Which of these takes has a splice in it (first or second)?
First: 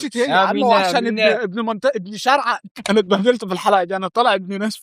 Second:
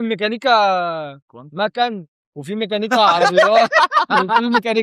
first